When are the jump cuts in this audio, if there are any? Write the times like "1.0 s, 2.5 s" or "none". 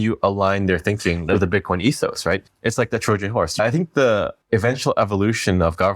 1.3 s, 2.4 s, 3.6 s, 4.4 s